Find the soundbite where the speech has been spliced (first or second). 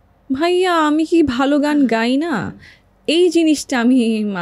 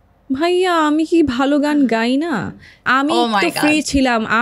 second